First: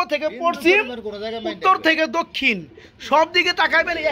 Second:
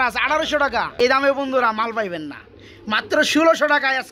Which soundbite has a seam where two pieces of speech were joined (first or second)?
second